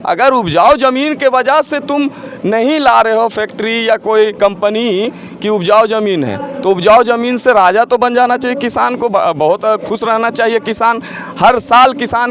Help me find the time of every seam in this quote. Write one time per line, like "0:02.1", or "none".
none